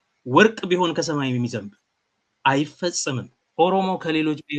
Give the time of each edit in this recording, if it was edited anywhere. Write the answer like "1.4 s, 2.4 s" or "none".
3.4 s